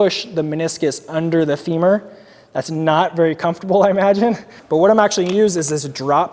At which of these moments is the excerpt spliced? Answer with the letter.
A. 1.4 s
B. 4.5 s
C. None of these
B